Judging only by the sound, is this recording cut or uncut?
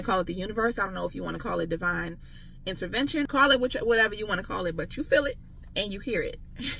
cut